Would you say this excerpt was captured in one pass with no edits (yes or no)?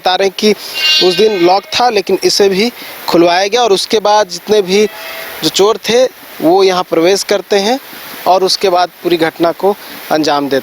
yes